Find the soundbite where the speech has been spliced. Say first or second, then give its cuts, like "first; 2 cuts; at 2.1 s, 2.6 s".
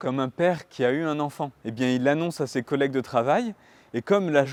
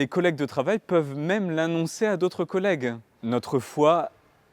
second; 1 cut; at 3.1 s